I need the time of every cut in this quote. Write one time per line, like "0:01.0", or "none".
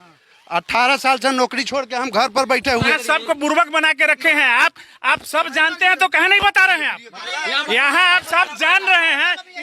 0:02.9
0:07.2